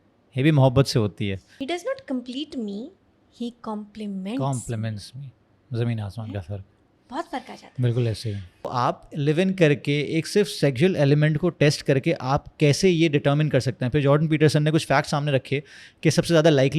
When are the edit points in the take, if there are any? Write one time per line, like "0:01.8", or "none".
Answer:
0:01.5
0:08.7